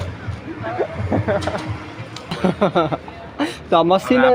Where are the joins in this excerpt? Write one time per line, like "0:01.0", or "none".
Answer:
0:02.4